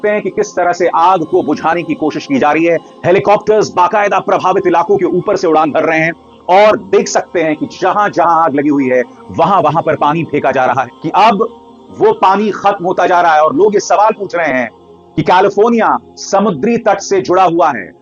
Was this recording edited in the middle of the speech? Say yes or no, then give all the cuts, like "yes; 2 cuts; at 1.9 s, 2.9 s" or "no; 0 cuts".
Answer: yes; 1 cut; at 10.9 s